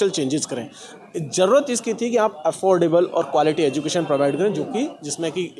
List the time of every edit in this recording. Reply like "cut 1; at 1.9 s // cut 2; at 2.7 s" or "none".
none